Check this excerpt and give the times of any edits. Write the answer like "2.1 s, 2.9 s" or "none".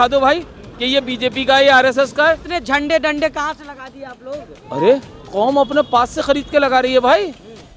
2.4 s